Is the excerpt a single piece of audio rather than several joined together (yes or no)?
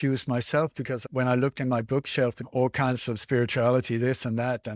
no